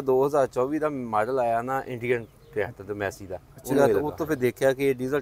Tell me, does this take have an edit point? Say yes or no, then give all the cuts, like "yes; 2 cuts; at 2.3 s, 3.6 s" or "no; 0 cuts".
yes; 1 cut; at 3.7 s